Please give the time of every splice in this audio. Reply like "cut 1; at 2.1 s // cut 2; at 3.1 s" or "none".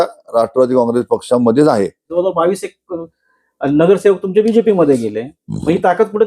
cut 1; at 2.1 s